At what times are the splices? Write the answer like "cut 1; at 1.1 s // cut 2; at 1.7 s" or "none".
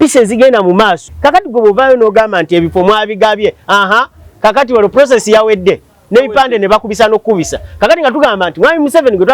cut 1; at 1.1 s